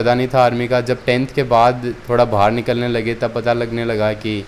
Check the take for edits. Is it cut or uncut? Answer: uncut